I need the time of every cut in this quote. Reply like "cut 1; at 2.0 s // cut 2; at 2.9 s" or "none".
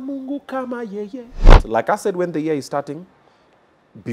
cut 1; at 1.6 s